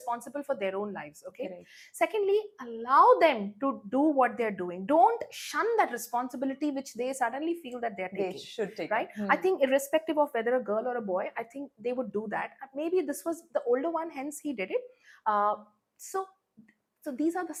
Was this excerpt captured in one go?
yes; 0 cuts

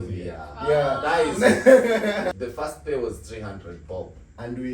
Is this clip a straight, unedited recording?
no; 1 cut; at 2.3 s

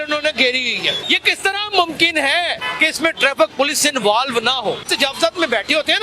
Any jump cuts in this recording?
yes; 3 cuts; at 1.0 s, 2.6 s, 4.9 s

